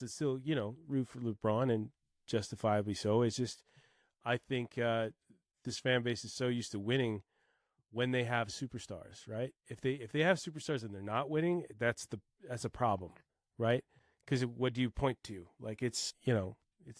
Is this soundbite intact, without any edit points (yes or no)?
no